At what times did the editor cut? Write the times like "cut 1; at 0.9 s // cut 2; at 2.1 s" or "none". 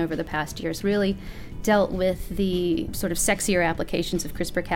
cut 1; at 0.8 s // cut 2; at 2.9 s